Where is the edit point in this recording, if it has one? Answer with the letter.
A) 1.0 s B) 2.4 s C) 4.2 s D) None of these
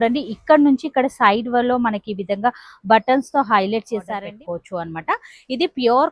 C